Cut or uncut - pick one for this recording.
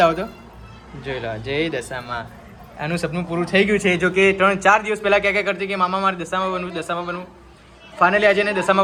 uncut